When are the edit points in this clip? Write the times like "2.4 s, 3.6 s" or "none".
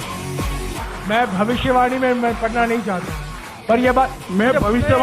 0.9 s